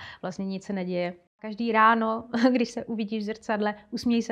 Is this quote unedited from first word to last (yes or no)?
no